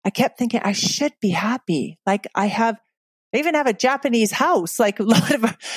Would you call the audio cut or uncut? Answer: uncut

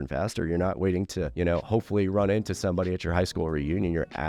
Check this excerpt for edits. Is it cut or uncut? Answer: cut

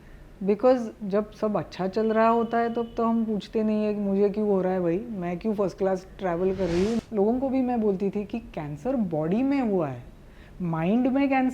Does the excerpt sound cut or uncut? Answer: cut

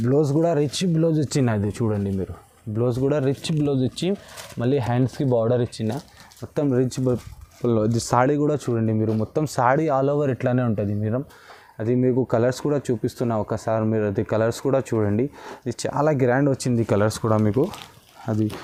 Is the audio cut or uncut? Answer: uncut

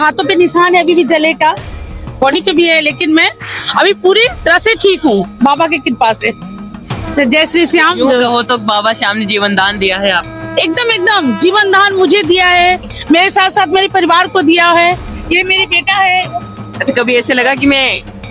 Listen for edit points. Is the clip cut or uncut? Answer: cut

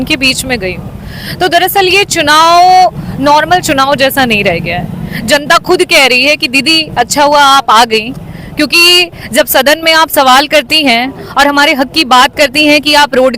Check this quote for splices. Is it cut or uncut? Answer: uncut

